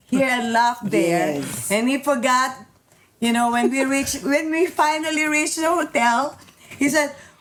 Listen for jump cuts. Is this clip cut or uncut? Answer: uncut